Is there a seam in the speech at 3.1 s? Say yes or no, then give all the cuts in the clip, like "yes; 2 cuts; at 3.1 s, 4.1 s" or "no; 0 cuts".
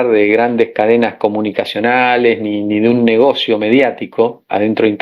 no; 0 cuts